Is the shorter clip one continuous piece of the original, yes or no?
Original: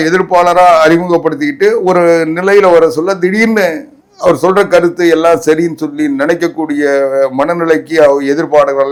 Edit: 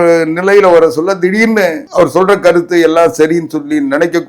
no